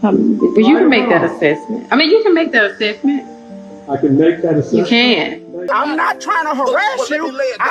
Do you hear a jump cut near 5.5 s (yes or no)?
yes